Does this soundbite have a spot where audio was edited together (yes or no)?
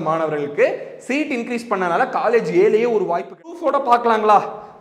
yes